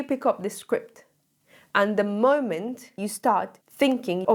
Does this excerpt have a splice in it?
no; 0 cuts

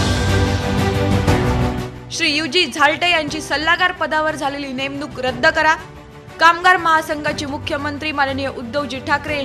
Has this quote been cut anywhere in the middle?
yes; 1 cut; at 2.0 s

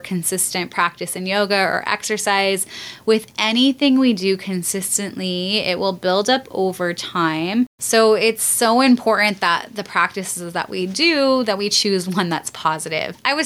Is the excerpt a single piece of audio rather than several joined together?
yes; 0 cuts

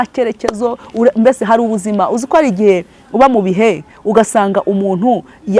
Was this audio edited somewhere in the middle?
no; 0 cuts

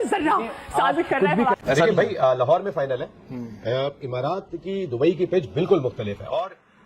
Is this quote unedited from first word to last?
no; 2 cuts; at 1.6 s, 2.7 s

